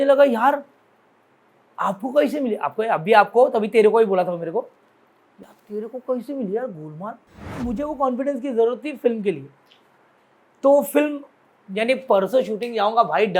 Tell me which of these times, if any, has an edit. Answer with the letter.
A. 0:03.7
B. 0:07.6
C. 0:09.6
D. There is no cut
B